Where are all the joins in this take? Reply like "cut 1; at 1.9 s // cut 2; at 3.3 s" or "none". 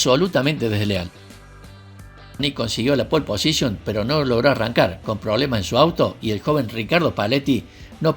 cut 1; at 2.4 s

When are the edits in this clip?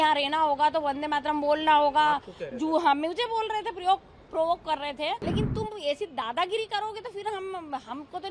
cut 1; at 5.2 s

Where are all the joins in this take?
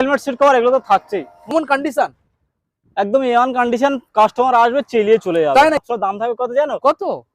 cut 1; at 1.5 s // cut 2; at 5.9 s

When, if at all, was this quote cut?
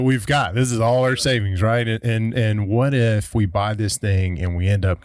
none

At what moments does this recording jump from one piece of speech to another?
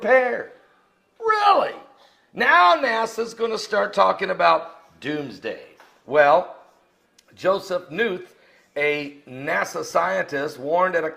cut 1; at 6.2 s

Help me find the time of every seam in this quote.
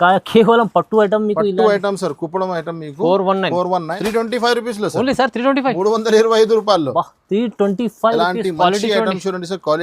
cut 1; at 3.9 s

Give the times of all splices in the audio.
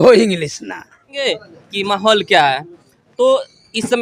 cut 1; at 1.3 s

